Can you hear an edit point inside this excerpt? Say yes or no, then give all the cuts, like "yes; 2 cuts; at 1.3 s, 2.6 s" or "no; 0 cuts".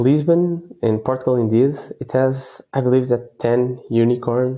no; 0 cuts